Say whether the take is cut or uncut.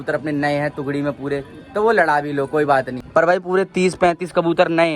cut